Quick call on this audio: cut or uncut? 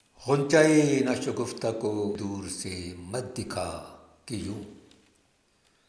cut